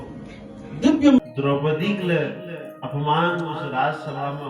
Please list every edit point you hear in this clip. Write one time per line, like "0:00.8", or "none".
0:01.3